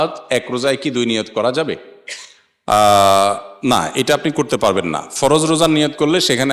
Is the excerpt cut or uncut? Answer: uncut